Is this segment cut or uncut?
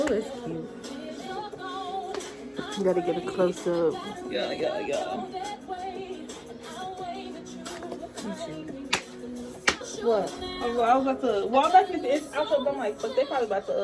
uncut